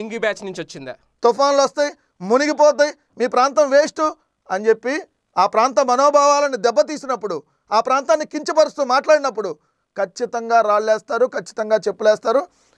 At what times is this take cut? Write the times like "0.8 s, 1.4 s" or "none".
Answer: 1.2 s